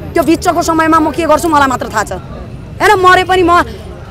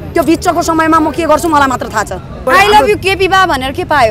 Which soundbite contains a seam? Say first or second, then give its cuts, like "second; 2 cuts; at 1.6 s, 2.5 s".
second; 1 cut; at 2.4 s